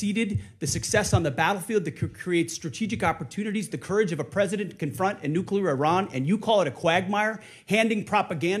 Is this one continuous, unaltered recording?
yes; 0 cuts

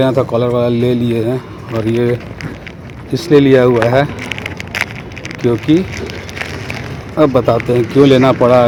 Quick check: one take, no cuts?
yes; 0 cuts

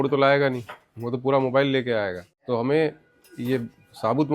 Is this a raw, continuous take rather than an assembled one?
no; 1 cut; at 2.3 s

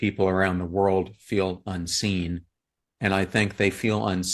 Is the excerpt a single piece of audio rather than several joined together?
yes; 0 cuts

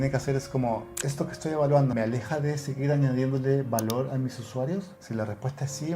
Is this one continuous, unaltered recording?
no; 2 cuts; at 1.9 s, 5.0 s

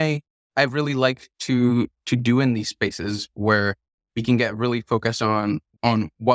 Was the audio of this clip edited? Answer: no; 0 cuts

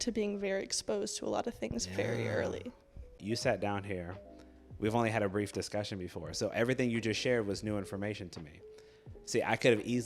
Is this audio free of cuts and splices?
no; 1 cut; at 3.2 s

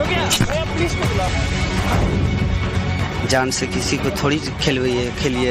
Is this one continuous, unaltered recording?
no; 1 cut; at 1.1 s

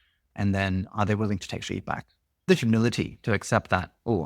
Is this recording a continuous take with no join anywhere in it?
no; 1 cut; at 2.5 s

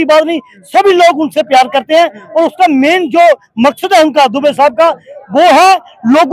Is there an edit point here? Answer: no; 0 cuts

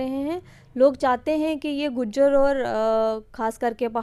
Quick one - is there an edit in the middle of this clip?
no; 0 cuts

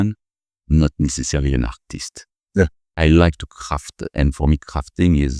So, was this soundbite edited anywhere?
yes; 1 cut; at 2.9 s

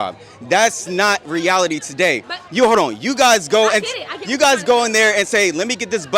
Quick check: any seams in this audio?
no; 0 cuts

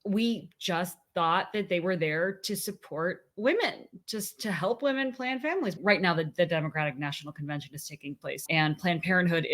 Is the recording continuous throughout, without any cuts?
no; 2 cuts; at 5.7 s, 8.4 s

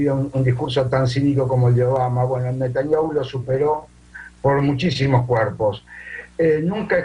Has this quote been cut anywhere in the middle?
no; 0 cuts

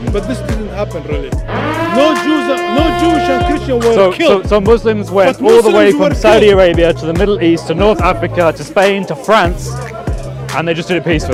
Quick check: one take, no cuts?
yes; 0 cuts

